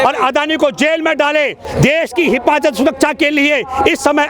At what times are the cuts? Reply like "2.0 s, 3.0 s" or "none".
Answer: 1.6 s